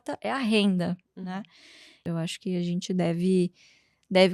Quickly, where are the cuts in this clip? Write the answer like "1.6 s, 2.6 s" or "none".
2.0 s